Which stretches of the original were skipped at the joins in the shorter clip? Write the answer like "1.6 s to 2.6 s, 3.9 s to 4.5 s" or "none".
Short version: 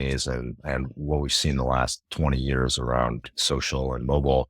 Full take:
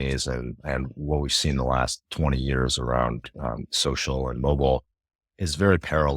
3.3 s to 3.7 s